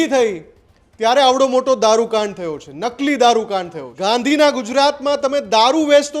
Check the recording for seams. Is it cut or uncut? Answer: cut